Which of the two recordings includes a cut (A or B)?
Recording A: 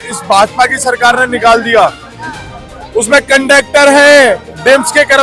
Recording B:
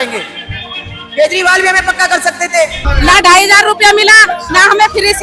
B